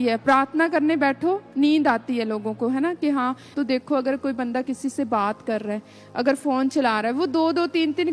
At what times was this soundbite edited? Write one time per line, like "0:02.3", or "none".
0:03.5